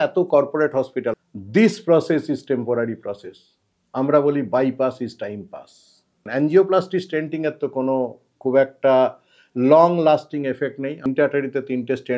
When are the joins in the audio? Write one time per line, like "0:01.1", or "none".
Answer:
0:01.1
0:06.2
0:11.1